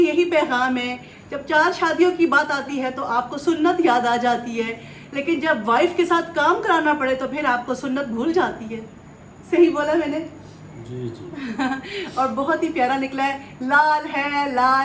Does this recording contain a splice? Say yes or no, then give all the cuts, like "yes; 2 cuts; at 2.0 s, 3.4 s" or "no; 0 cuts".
no; 0 cuts